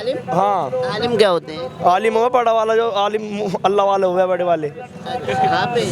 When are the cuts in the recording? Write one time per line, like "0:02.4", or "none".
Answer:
none

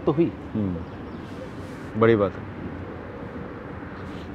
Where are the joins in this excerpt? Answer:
none

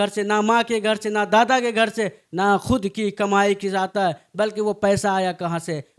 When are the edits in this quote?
none

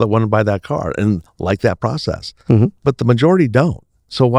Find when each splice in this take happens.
none

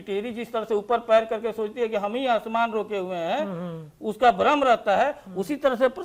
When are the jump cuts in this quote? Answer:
none

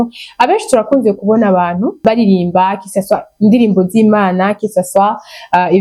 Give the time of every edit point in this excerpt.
none

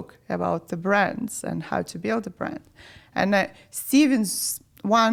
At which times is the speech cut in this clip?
none

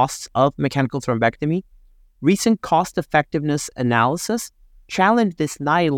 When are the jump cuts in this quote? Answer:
none

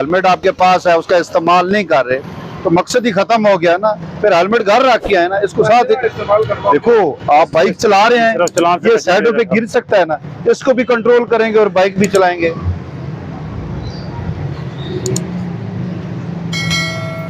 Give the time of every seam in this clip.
none

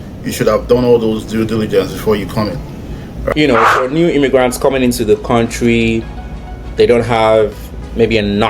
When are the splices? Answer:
0:03.3

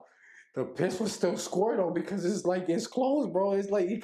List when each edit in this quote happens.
none

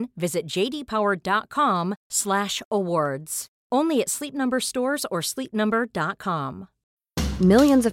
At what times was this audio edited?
0:06.9

